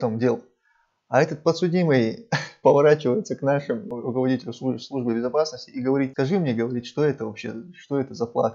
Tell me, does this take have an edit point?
yes; 2 cuts; at 4.0 s, 6.1 s

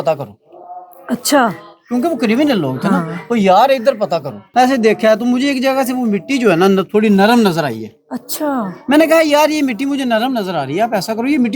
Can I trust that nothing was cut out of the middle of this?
no; 1 cut; at 4.4 s

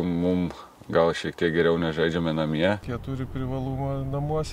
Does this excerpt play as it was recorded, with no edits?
no; 1 cut; at 2.9 s

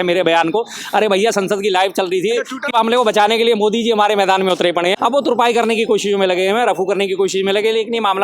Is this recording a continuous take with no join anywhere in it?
no; 2 cuts; at 2.7 s, 5.0 s

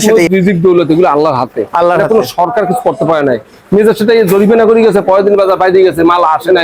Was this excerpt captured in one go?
yes; 0 cuts

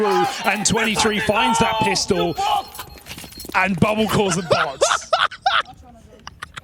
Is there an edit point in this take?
no; 0 cuts

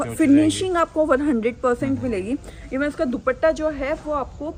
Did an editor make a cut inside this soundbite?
no; 0 cuts

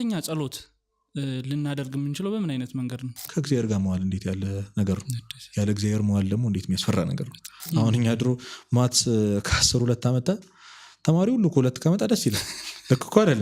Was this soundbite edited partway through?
yes; 2 cuts; at 3.2 s, 7.7 s

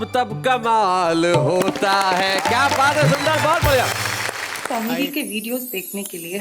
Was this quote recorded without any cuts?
no; 1 cut; at 4.5 s

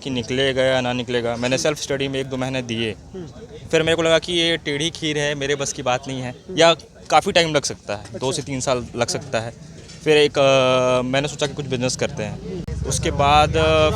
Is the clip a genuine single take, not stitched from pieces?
no; 1 cut; at 12.7 s

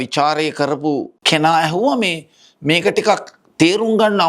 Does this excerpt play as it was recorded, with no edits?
no; 1 cut; at 1.1 s

